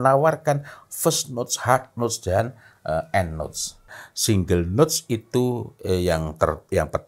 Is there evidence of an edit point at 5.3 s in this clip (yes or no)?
no